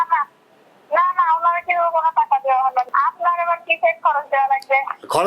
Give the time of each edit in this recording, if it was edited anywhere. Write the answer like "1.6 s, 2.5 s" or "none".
2.9 s